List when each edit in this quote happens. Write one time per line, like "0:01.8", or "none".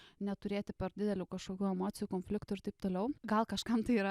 0:03.2